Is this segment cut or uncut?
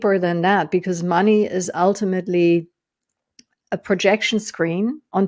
uncut